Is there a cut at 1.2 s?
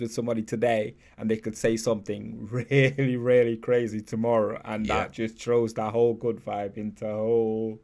no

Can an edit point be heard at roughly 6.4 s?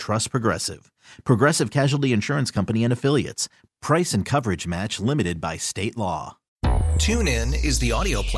yes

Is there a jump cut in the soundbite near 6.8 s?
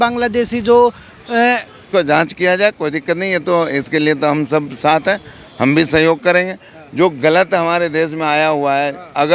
no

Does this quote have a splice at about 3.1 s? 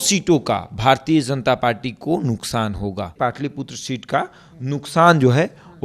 yes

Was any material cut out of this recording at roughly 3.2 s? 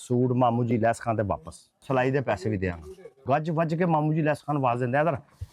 yes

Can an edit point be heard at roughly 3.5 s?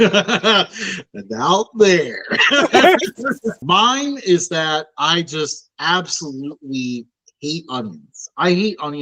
yes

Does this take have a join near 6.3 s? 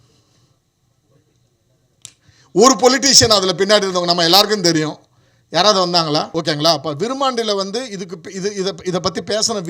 yes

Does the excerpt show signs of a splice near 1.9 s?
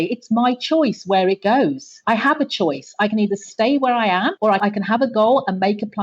yes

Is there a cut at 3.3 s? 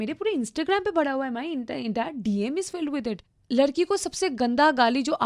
yes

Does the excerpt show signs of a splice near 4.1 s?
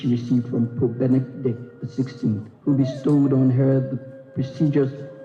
no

